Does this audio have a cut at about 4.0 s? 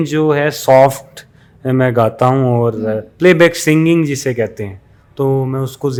no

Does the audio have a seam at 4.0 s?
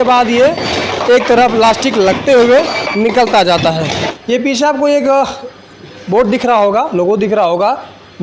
yes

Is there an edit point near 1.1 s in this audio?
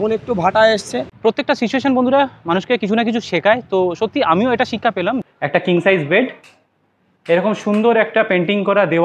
yes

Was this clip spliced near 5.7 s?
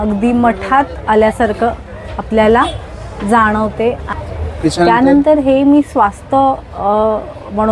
no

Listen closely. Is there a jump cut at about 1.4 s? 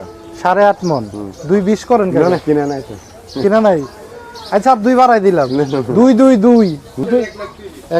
yes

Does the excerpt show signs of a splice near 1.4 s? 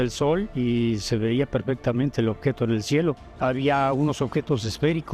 no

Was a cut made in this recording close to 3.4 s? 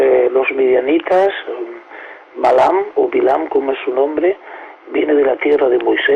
yes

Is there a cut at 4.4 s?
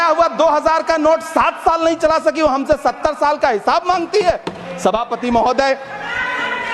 no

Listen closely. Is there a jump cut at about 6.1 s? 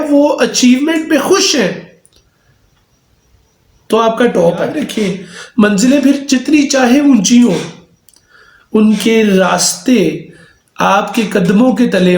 no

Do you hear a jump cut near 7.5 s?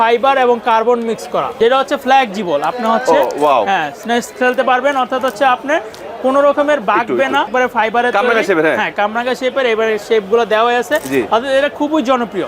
yes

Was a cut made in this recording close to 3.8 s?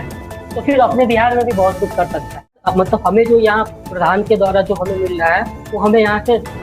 no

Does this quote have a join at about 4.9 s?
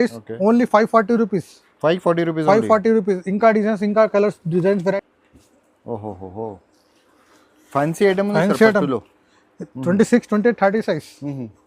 yes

